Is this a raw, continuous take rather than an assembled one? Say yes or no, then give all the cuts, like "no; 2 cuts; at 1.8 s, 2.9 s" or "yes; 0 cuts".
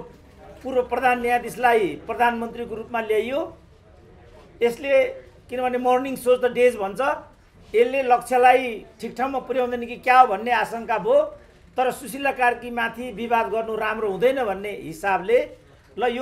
yes; 0 cuts